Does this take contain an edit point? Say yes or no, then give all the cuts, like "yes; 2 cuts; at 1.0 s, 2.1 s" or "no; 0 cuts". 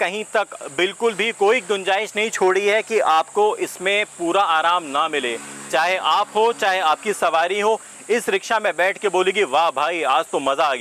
no; 0 cuts